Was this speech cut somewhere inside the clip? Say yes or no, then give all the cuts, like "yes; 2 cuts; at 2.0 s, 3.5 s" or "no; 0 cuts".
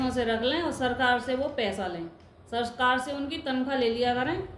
no; 0 cuts